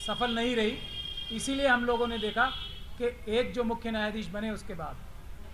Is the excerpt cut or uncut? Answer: uncut